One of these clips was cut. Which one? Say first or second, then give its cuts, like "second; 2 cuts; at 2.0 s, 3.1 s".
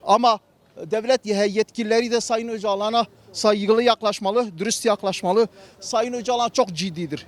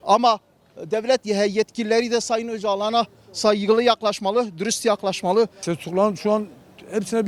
second; 1 cut; at 5.6 s